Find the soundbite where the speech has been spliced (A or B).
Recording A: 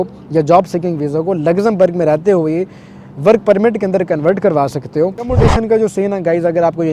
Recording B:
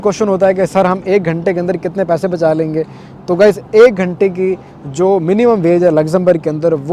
A